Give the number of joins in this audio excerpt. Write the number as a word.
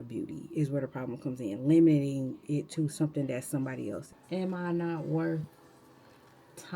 one